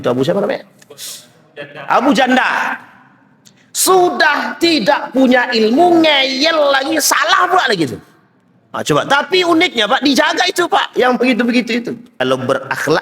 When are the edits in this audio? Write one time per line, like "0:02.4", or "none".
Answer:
0:12.1